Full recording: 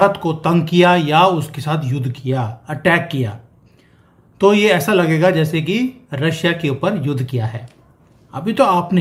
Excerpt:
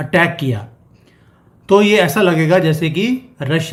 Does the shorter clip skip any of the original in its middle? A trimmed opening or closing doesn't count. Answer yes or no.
no